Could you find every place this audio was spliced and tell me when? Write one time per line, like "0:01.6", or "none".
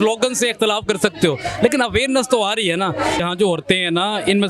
0:03.2